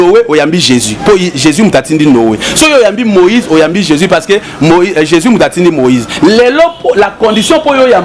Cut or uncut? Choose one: uncut